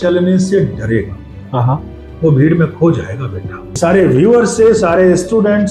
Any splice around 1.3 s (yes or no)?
no